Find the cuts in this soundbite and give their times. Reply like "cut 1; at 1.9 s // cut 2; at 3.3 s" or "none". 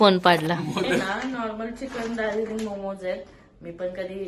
cut 1; at 1.0 s

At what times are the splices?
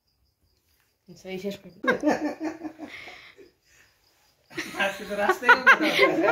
cut 1; at 1.7 s

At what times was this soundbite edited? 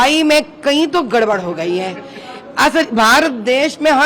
none

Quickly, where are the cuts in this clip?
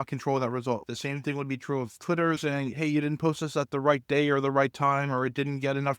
cut 1; at 0.9 s // cut 2; at 2.4 s

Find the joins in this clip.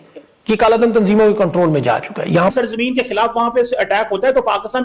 cut 1; at 2.5 s

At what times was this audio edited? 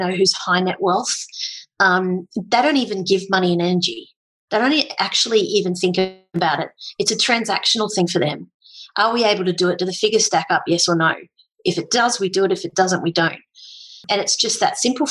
cut 1; at 14.0 s

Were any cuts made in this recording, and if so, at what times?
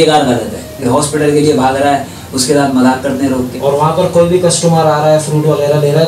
cut 1; at 0.8 s // cut 2; at 3.5 s

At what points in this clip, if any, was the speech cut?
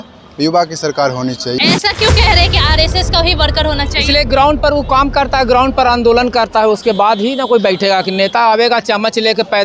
cut 1; at 1.6 s

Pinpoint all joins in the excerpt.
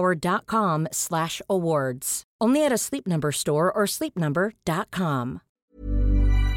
cut 1; at 5.5 s

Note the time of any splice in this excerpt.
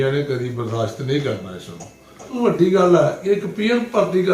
cut 1; at 2.3 s

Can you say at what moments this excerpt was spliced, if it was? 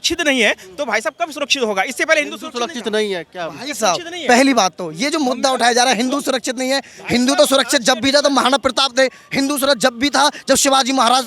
none

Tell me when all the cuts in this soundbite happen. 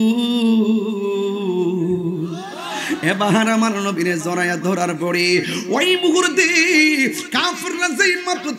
none

